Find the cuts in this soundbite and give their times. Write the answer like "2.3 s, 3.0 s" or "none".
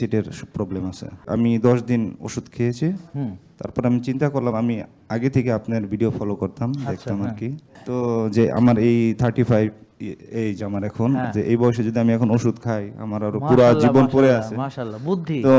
1.2 s, 7.7 s